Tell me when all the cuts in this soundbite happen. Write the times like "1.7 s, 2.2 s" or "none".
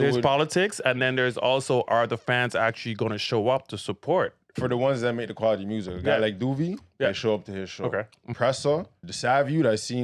8.2 s, 9.0 s